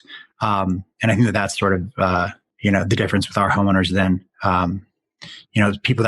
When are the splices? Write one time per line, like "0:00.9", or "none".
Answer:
none